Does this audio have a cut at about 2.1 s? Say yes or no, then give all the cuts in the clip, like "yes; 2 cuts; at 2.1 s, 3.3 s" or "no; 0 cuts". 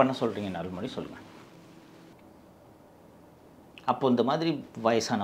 yes; 1 cut; at 2.1 s